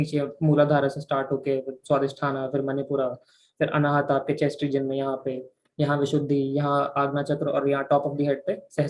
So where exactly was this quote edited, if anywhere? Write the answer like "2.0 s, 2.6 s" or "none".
none